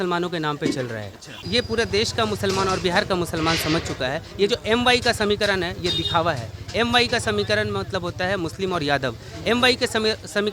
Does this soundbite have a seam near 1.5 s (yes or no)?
yes